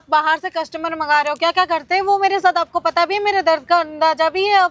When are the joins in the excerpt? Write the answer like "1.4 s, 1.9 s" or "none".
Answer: none